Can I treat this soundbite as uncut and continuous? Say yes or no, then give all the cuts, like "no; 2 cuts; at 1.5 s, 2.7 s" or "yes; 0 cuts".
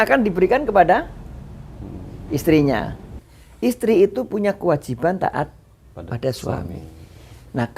no; 1 cut; at 3.3 s